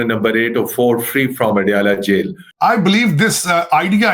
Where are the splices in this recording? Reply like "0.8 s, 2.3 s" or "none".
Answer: 2.4 s